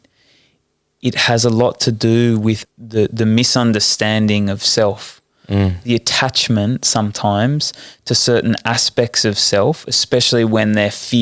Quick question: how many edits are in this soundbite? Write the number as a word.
one